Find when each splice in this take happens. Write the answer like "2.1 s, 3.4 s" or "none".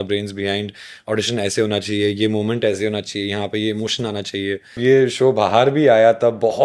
4.8 s